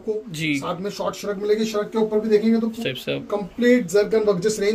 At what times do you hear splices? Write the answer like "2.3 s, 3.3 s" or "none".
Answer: 2.8 s